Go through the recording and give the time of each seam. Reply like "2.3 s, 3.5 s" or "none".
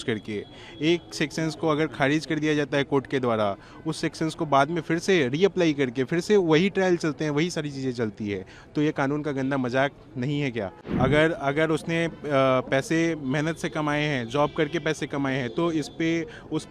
10.8 s